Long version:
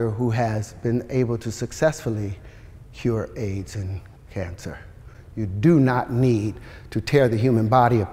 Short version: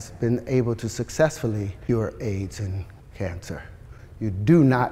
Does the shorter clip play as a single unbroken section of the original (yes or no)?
no